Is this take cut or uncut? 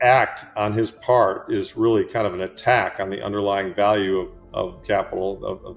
cut